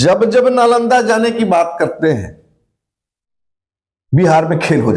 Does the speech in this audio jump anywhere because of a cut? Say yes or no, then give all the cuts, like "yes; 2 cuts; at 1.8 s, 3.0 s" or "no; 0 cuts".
no; 0 cuts